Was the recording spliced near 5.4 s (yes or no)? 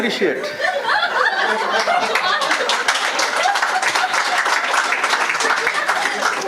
no